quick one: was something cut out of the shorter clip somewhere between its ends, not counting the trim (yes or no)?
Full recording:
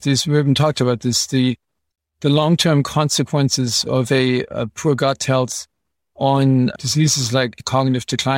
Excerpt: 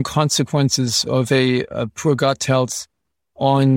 no